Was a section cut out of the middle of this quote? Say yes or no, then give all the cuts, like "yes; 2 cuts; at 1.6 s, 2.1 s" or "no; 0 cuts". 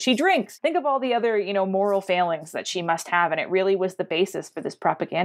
no; 0 cuts